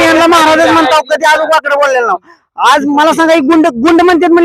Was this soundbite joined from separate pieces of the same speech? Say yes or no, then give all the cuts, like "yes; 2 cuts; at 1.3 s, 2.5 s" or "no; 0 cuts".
no; 0 cuts